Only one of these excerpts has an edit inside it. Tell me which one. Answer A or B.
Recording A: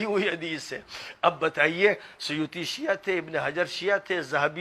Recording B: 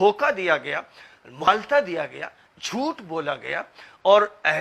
B